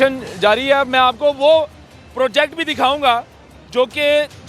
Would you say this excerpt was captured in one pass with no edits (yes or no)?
yes